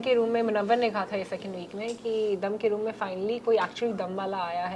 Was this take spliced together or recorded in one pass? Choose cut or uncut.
uncut